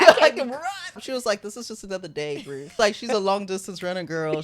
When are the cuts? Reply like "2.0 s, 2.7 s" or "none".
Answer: 1.0 s, 2.7 s